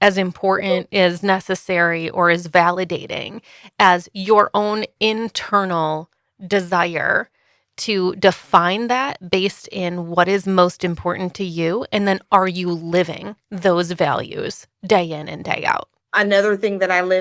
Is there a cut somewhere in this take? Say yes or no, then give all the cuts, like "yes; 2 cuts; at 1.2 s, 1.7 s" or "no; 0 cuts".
yes; 1 cut; at 16.0 s